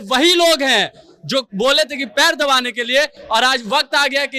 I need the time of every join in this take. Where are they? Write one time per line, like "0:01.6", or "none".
none

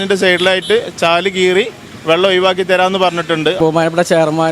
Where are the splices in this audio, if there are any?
0:03.6

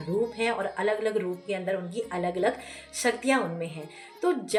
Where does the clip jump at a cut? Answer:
none

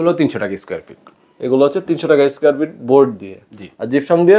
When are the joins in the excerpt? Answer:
none

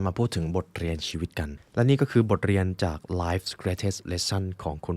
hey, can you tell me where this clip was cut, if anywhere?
0:01.6

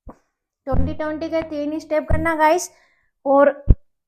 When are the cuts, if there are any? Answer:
none

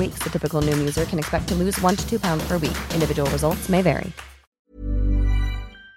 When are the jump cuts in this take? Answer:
0:04.6

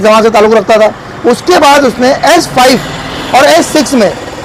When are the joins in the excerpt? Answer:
none

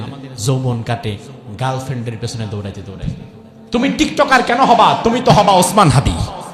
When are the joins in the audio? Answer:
0:03.5

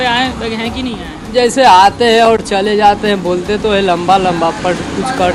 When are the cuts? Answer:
none

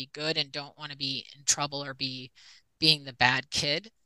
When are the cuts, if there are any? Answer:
none

